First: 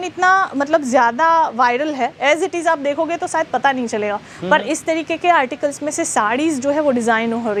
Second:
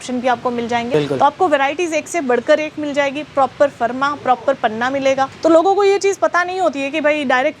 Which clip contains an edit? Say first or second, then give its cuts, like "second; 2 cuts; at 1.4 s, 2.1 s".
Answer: second; 2 cuts; at 0.9 s, 5.3 s